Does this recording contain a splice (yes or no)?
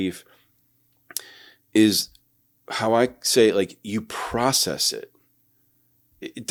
no